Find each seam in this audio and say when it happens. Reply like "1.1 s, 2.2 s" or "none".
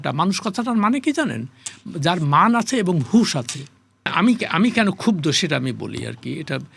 4.0 s